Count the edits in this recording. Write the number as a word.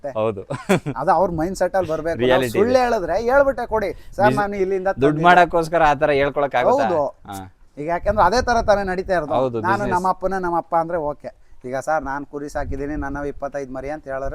zero